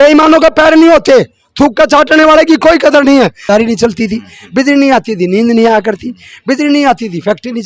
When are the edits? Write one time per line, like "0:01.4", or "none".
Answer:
0:03.4

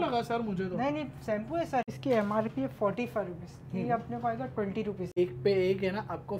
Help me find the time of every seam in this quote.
0:01.9
0:05.1

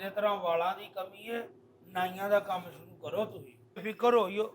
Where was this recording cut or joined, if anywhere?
0:03.5

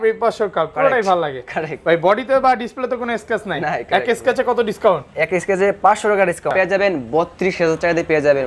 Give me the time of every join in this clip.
0:06.5

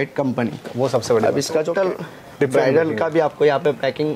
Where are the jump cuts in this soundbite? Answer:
0:01.6

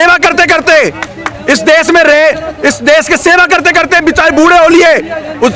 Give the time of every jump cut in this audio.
none

